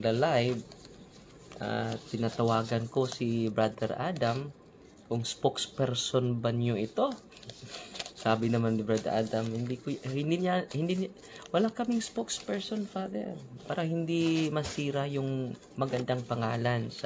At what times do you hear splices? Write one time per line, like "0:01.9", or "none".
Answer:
0:13.5

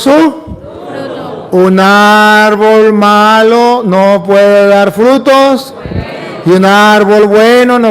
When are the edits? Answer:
0:03.8

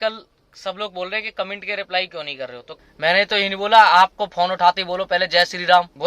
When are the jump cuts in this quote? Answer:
0:02.7

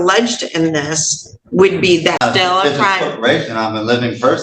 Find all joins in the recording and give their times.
0:02.2

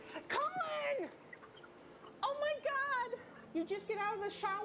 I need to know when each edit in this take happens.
0:03.3

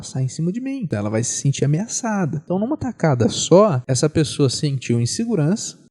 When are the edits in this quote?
0:00.8
0:02.4
0:03.9

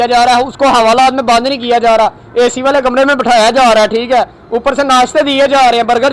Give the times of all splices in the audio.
none

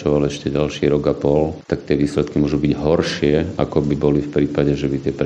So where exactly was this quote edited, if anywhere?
0:01.6

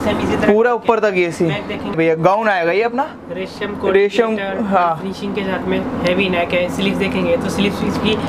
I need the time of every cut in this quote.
0:01.9

